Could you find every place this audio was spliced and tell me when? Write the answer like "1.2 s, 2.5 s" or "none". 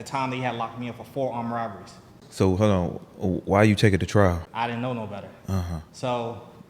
2.1 s, 4.5 s

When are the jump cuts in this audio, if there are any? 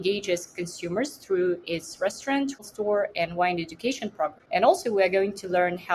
2.6 s, 4.4 s

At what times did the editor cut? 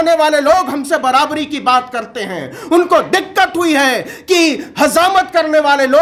none

